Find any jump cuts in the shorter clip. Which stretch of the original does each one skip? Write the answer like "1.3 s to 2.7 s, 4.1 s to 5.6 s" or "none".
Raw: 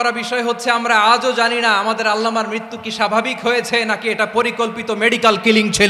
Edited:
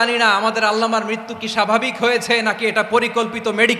none